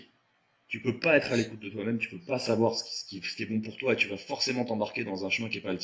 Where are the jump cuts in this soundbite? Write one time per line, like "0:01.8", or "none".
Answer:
none